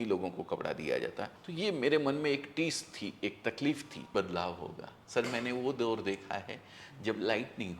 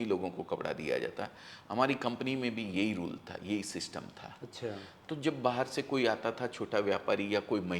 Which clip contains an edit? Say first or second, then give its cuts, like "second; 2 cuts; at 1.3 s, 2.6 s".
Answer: first; 2 cuts; at 1.4 s, 4.1 s